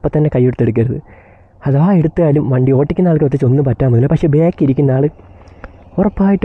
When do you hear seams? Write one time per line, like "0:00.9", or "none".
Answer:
none